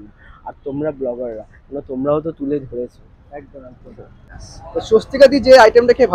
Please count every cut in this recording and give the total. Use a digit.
1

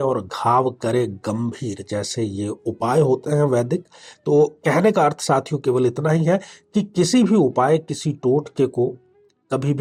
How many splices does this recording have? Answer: 0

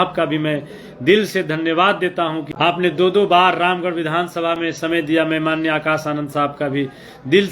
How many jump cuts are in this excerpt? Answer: 1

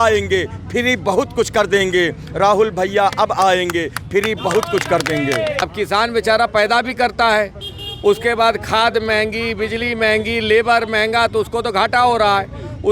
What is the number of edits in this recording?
1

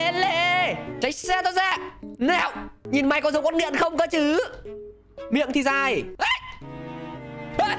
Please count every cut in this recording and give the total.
3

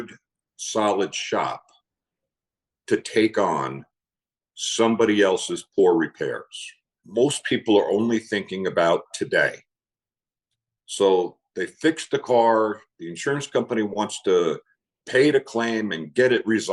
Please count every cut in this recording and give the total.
1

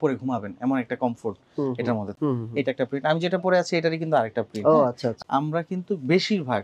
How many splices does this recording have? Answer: 2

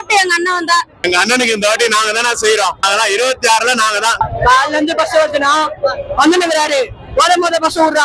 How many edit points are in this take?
1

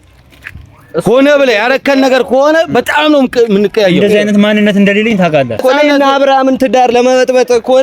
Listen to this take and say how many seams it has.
1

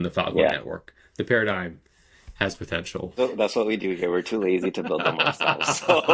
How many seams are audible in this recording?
1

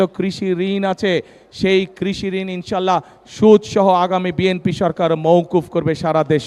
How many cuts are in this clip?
0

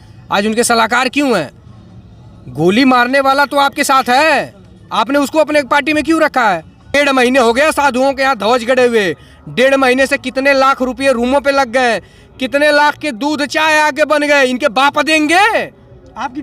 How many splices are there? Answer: 1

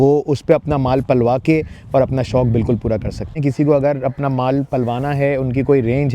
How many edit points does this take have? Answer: 1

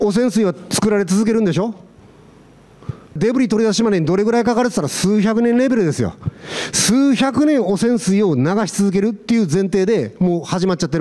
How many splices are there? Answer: 1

